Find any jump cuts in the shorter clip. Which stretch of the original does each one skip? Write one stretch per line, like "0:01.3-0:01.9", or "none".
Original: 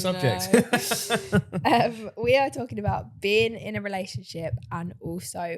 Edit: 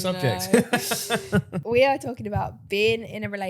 0:01.5-0:02.0